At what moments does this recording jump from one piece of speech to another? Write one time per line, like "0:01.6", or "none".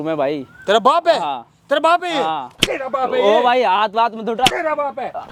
none